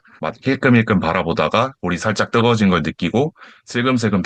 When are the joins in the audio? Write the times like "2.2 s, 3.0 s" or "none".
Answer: none